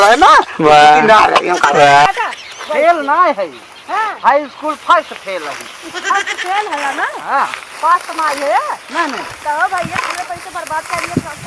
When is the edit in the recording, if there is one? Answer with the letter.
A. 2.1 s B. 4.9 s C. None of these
A